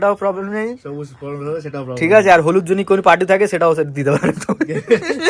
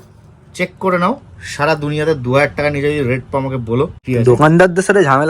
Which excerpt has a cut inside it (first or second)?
second